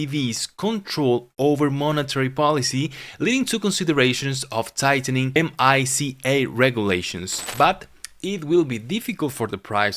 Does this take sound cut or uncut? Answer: cut